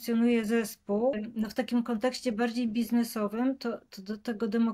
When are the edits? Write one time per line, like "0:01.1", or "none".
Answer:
0:01.2